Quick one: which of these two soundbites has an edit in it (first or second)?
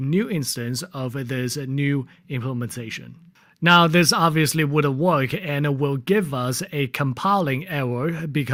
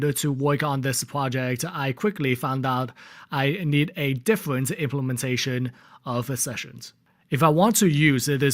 second